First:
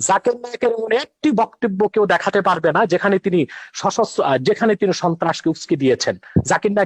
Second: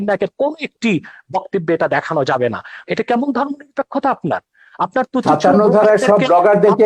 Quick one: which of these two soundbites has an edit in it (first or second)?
second